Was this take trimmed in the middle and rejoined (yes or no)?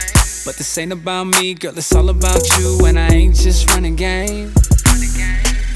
no